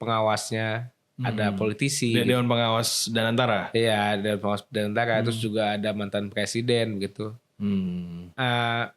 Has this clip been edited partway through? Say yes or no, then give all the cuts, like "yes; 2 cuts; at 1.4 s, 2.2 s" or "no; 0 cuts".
no; 0 cuts